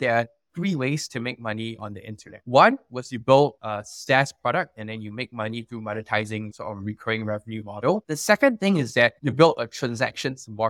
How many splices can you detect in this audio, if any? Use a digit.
1